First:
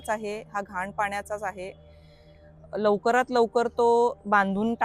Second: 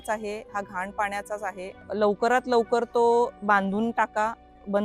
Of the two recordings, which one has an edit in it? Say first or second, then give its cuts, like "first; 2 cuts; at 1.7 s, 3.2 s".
second; 1 cut; at 1.8 s